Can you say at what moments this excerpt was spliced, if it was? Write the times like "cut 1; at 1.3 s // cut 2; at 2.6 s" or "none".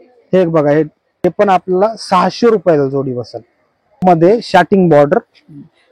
cut 1; at 1.0 s // cut 2; at 4.0 s